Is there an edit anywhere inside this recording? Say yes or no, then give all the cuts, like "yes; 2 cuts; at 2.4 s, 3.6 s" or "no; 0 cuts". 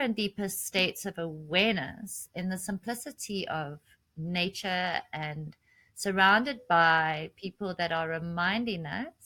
no; 0 cuts